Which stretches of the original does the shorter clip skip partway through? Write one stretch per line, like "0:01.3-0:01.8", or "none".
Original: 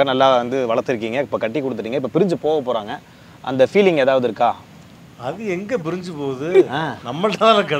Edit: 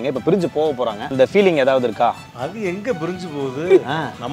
0:02.9-0:03.4
0:04.7-0:05.1